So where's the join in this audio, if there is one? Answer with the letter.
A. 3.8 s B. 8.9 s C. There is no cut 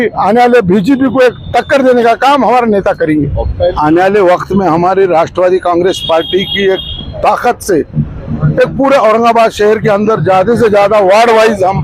A